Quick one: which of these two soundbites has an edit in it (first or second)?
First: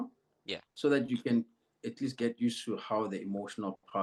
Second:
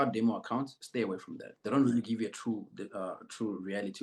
second